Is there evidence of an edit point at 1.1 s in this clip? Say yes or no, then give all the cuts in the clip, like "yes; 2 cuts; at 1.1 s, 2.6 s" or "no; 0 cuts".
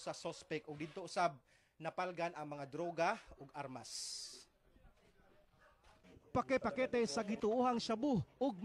yes; 1 cut; at 1.1 s